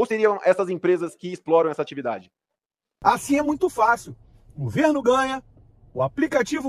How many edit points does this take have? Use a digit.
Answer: 1